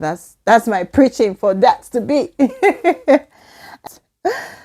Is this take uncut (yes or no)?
no